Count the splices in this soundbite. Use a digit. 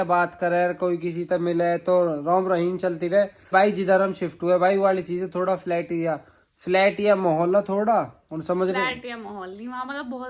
1